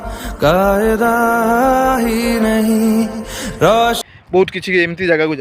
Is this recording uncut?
no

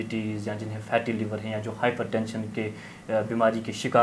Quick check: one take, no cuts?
yes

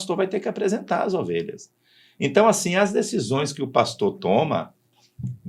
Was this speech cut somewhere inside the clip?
no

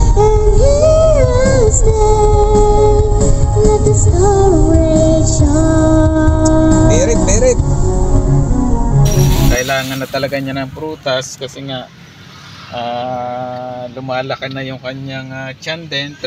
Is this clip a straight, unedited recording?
no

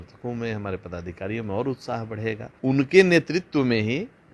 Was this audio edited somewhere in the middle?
yes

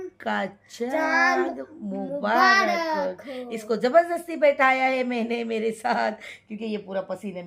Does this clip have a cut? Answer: no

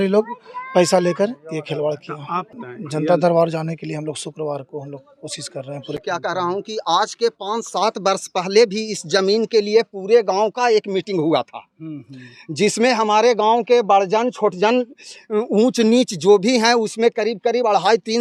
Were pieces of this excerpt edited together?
no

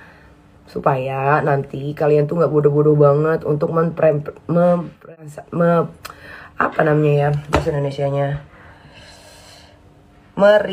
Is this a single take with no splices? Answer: no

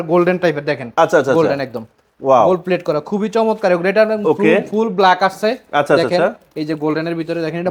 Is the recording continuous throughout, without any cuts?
yes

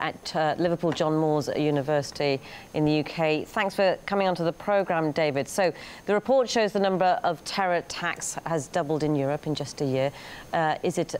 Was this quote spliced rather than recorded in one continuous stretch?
yes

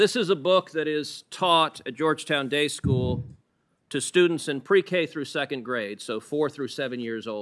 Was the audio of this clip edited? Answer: no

